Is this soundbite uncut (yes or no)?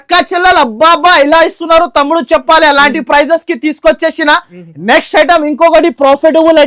yes